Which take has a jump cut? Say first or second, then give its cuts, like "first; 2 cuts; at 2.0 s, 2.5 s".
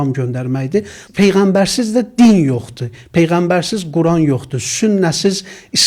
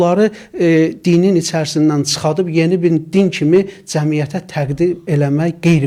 first; 1 cut; at 1.0 s